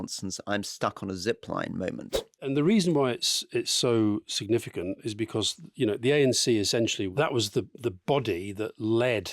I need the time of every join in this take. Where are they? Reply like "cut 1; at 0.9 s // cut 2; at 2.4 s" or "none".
cut 1; at 2.5 s // cut 2; at 7.1 s